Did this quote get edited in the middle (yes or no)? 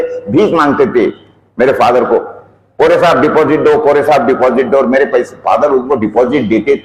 no